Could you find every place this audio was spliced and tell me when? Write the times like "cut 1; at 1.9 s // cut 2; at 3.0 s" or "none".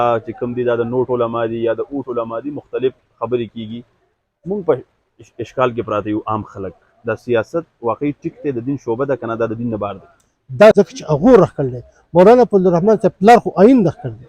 cut 1; at 10.7 s